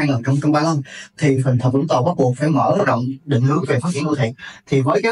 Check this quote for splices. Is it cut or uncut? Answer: uncut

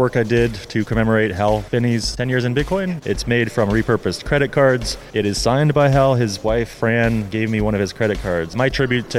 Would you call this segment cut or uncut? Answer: cut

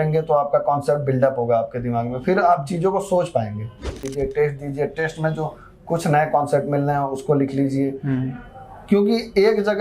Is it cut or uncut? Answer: cut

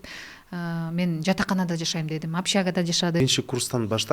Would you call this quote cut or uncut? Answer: cut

